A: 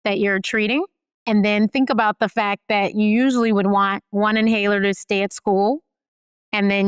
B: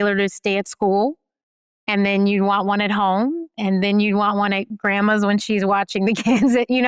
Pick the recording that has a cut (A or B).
A